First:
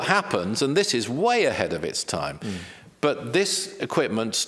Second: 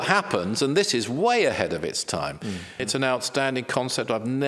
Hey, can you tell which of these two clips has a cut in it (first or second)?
second